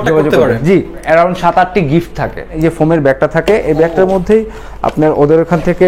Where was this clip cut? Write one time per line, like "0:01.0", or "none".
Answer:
0:01.0
0:02.5